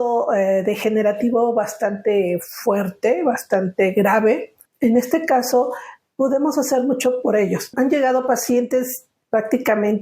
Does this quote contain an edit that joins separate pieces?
yes; 2 cuts; at 4.6 s, 7.7 s

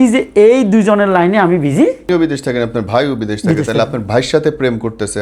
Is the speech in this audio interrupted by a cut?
yes; 1 cut; at 2.0 s

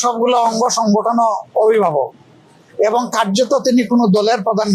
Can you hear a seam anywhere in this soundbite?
no; 0 cuts

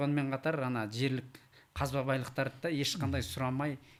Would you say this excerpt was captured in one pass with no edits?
yes; 0 cuts

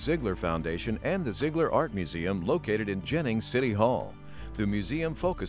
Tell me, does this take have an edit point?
no; 0 cuts

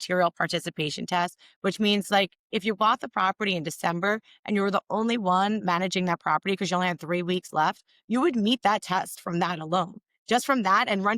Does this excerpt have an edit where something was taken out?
no; 0 cuts

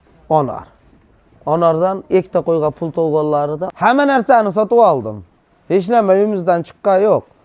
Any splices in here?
yes; 1 cut; at 3.7 s

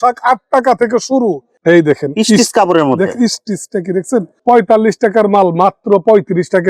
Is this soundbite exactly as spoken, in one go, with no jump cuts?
no; 1 cut; at 1.5 s

